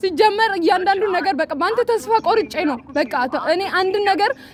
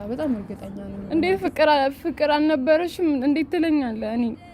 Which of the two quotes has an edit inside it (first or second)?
second